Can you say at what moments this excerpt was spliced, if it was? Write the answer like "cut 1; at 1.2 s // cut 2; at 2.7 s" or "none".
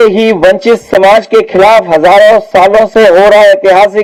none